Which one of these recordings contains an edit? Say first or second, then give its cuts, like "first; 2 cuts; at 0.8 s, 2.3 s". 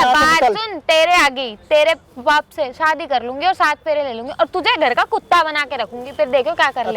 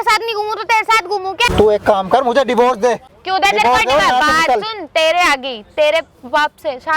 second; 2 cuts; at 1.5 s, 3.1 s